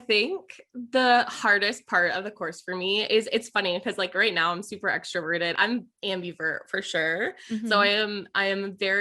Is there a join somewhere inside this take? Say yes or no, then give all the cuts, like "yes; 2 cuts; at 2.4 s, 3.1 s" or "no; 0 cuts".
yes; 1 cut; at 5.5 s